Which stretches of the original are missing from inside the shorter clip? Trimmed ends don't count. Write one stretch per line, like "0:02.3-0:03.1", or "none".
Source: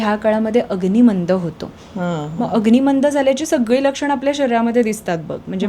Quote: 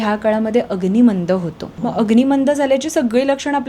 0:01.7-0:02.3